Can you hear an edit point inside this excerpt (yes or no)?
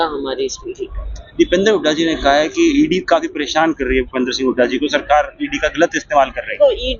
no